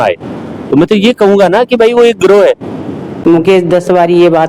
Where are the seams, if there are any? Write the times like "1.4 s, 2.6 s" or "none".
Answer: 3.2 s